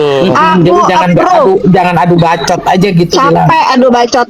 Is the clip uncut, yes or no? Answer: yes